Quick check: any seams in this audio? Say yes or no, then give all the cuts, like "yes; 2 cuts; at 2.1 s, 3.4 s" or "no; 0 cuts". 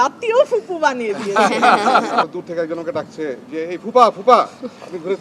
yes; 1 cut; at 2.2 s